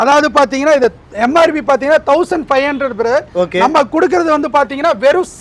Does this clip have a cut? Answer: no; 0 cuts

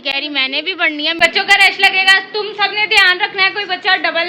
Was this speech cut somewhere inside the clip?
yes; 1 cut; at 1.1 s

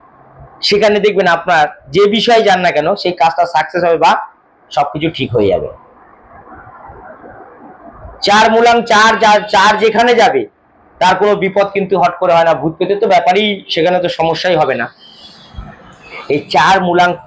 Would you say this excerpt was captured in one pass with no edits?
yes; 0 cuts

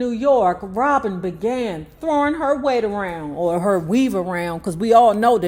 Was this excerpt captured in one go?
yes; 0 cuts

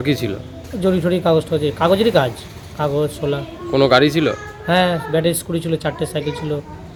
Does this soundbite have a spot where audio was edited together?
no; 0 cuts

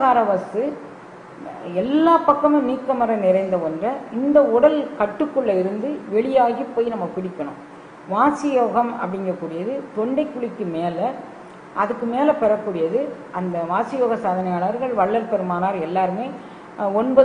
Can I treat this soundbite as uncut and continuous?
yes; 0 cuts

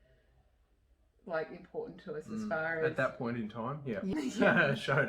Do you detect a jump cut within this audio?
yes; 1 cut; at 4.1 s

